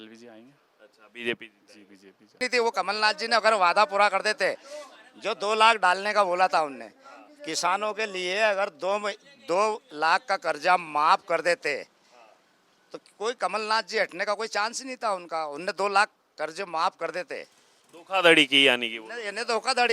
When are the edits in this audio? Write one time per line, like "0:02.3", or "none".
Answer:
0:02.4